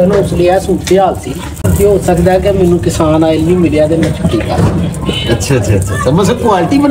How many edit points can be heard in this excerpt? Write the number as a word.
one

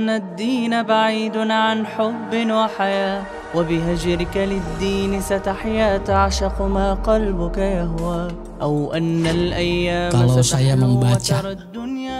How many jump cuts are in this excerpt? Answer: zero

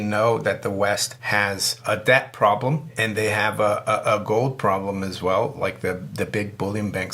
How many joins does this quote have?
two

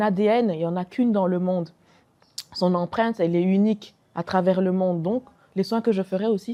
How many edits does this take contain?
zero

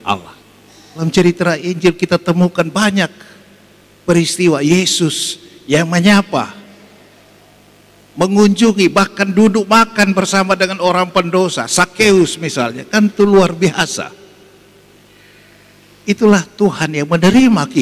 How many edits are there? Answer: one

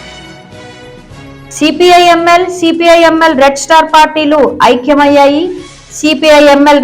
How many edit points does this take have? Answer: one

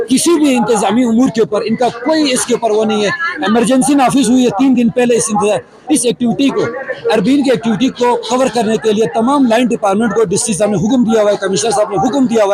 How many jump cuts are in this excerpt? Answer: zero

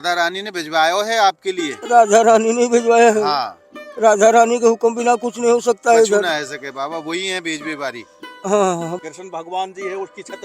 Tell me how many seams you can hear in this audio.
one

